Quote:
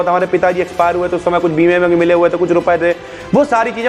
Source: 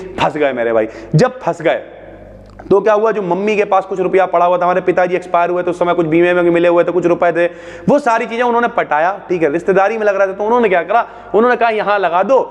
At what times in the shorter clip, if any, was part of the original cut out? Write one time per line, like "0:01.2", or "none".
none